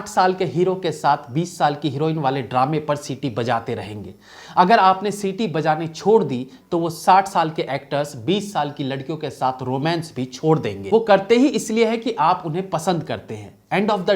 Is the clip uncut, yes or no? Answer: yes